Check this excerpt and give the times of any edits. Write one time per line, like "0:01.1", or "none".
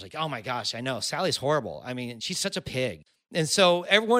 0:03.0

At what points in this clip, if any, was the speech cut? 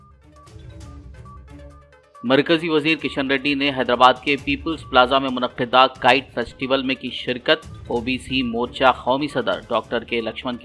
0:01.7

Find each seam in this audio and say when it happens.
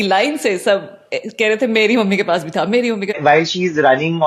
0:03.2

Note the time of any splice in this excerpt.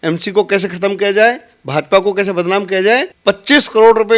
0:03.1

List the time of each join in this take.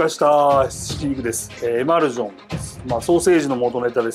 0:01.5

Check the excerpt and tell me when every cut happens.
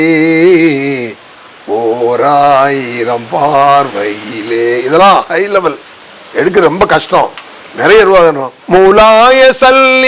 0:08.5

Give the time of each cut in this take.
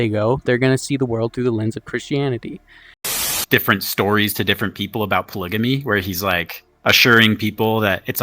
0:03.1

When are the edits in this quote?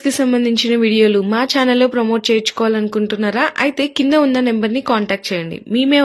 none

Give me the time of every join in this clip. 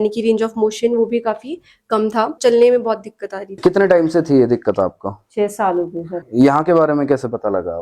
0:02.4
0:03.5
0:06.1

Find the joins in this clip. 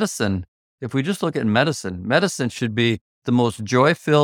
0:03.1

